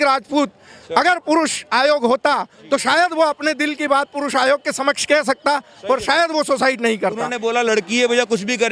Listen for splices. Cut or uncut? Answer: cut